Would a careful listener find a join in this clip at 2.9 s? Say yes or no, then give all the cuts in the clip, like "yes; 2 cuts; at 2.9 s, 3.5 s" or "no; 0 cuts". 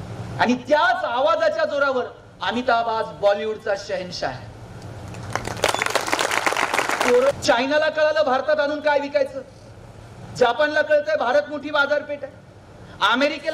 no; 1 cut; at 7.3 s